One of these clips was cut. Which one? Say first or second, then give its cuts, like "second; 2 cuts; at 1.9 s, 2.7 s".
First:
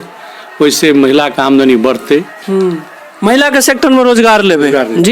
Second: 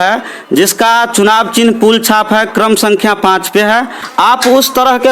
second; 1 cut; at 4.0 s